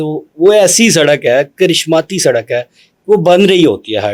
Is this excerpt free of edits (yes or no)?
yes